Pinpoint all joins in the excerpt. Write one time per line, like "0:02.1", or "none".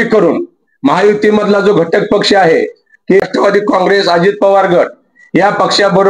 0:03.2